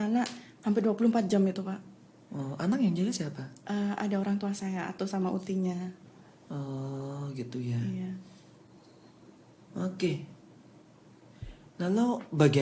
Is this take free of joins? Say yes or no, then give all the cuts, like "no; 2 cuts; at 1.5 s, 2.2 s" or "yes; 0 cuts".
yes; 0 cuts